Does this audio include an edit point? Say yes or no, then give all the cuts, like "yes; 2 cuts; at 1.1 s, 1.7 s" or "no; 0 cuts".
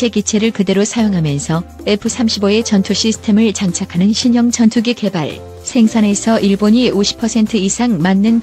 no; 0 cuts